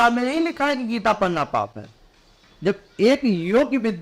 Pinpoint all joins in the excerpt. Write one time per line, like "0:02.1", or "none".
none